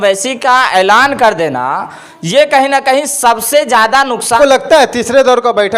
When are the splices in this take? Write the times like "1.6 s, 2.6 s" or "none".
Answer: 4.3 s